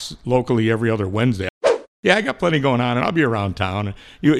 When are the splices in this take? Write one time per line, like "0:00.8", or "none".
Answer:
0:01.4